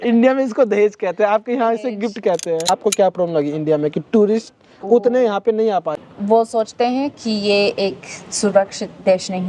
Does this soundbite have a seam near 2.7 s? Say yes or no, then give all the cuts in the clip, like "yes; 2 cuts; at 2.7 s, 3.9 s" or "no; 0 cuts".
yes; 2 cuts; at 2.7 s, 6.0 s